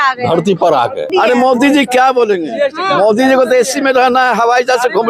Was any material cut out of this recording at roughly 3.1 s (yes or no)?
no